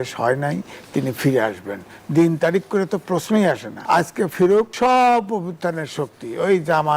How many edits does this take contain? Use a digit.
2